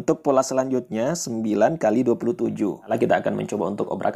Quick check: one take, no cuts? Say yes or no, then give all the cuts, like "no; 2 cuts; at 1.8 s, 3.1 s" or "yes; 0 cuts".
no; 1 cut; at 2.7 s